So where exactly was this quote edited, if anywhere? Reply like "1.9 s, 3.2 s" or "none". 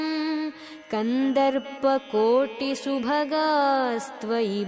none